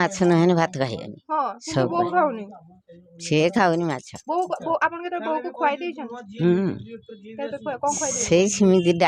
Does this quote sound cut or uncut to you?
uncut